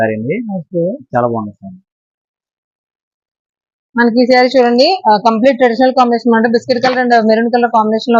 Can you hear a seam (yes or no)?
no